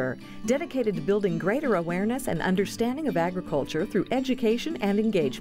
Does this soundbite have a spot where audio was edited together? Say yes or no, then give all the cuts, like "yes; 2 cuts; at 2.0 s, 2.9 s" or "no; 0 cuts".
no; 0 cuts